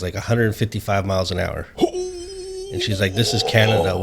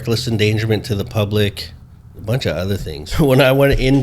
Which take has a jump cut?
second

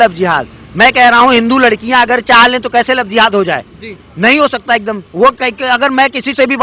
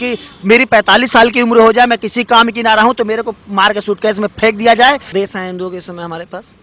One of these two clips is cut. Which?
second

